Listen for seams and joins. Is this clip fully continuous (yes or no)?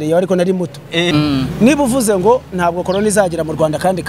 no